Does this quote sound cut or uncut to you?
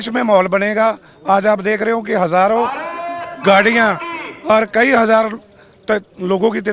uncut